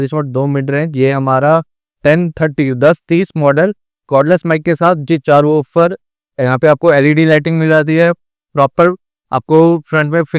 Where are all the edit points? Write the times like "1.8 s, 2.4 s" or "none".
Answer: 5.0 s